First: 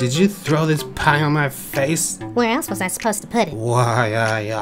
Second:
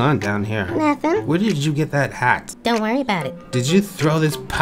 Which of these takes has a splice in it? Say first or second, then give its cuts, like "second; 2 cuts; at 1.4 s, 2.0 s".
first; 2 cuts; at 2.2 s, 3.6 s